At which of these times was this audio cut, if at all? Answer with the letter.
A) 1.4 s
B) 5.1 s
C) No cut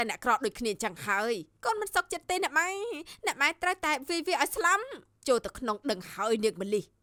C